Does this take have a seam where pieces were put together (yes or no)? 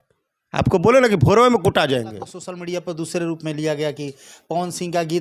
yes